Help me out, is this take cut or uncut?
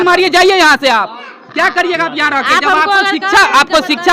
uncut